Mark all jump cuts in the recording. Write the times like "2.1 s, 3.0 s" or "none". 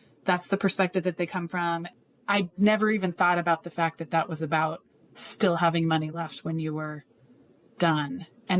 1.9 s